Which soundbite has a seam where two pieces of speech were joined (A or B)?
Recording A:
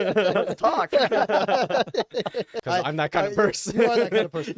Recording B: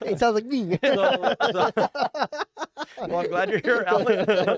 A